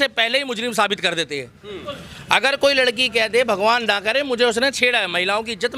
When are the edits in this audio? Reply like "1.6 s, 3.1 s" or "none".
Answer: none